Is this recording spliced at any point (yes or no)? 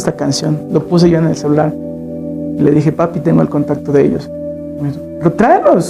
no